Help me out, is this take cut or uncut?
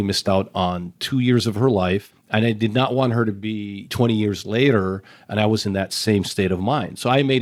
uncut